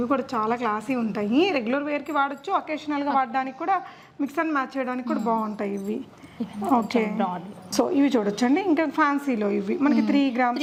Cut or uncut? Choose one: uncut